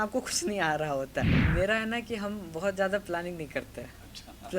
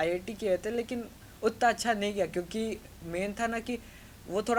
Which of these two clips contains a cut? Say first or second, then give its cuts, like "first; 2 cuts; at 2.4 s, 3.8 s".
first; 1 cut; at 1.4 s